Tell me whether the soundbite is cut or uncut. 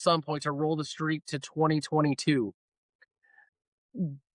uncut